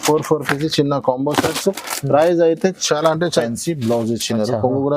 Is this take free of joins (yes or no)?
no